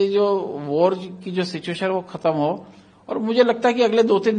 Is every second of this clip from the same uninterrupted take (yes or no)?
yes